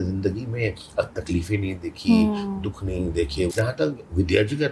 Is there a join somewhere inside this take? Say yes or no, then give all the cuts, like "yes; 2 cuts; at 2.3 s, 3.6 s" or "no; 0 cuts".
yes; 1 cut; at 3.5 s